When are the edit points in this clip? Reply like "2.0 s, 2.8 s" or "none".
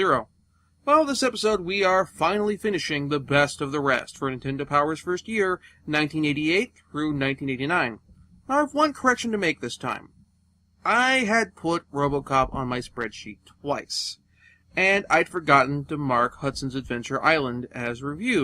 12.3 s